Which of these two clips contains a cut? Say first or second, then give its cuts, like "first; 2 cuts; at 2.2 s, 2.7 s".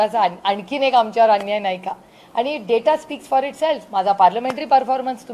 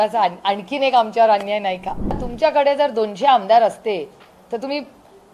second; 1 cut; at 2.2 s